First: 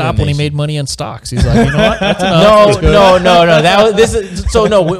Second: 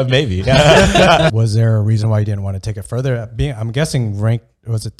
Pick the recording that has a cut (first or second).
second